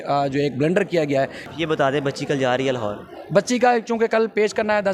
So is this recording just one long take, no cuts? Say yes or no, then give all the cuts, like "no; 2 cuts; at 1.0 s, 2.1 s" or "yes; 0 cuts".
no; 1 cut; at 1.4 s